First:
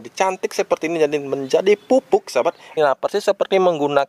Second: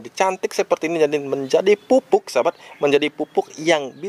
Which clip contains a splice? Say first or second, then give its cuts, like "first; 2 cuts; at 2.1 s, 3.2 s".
first; 1 cut; at 2.7 s